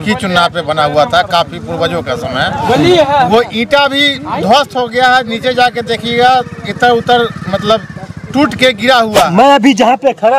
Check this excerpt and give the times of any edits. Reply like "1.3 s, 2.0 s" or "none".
9.3 s